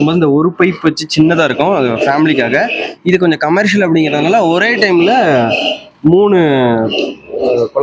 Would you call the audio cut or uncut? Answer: uncut